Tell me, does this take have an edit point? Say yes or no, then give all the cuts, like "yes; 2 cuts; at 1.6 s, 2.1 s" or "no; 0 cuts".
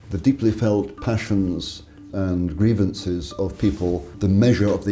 yes; 2 cuts; at 2.1 s, 4.1 s